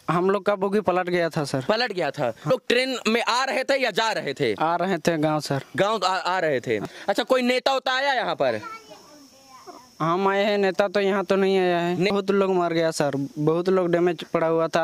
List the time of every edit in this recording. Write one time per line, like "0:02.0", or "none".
0:02.5
0:06.9
0:12.1